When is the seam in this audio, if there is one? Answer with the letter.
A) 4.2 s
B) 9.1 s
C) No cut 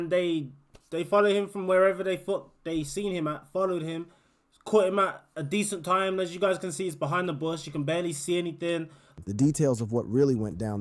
B